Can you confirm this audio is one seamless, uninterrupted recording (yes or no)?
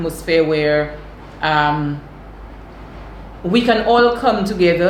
yes